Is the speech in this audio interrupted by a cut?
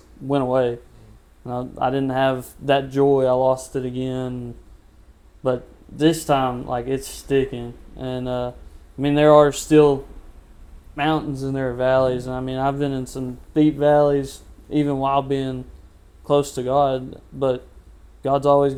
no; 0 cuts

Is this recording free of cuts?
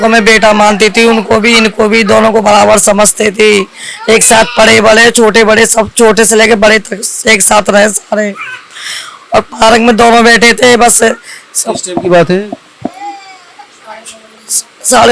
yes; 0 cuts

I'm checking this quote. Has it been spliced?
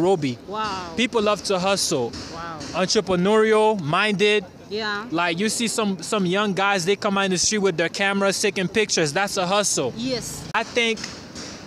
yes; 1 cut; at 10.5 s

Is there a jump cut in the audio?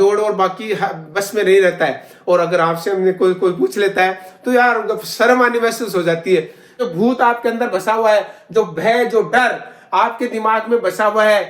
yes; 1 cut; at 6.8 s

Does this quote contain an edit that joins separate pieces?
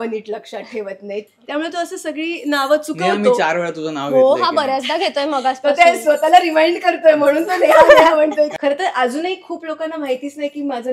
yes; 2 cuts; at 1.2 s, 8.5 s

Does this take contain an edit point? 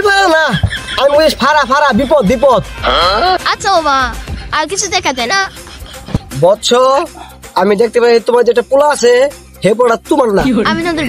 no; 0 cuts

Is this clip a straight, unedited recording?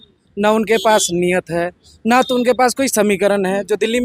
yes; 0 cuts

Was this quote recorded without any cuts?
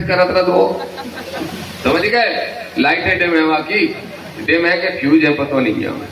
yes; 0 cuts

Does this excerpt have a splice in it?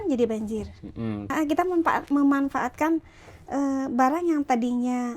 yes; 1 cut; at 1.3 s

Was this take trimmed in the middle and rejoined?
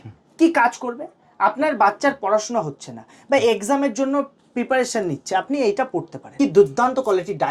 yes; 1 cut; at 6.2 s

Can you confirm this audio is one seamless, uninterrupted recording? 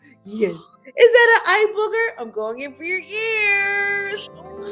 yes; 0 cuts

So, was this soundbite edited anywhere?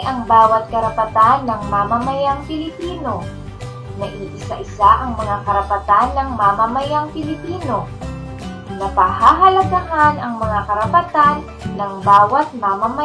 no; 0 cuts

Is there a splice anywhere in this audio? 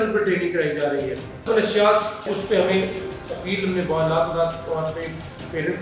yes; 2 cuts; at 1.5 s, 2.2 s

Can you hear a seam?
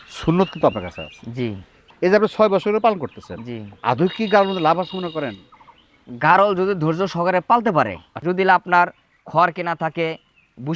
yes; 1 cut; at 8.1 s

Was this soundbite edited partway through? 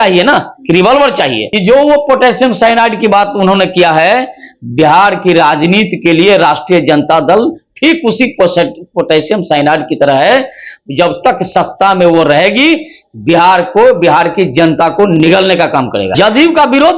yes; 2 cuts; at 1.4 s, 16.1 s

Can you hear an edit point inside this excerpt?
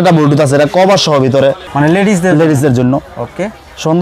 yes; 1 cut; at 1.7 s

